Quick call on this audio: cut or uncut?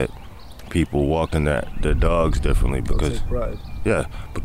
uncut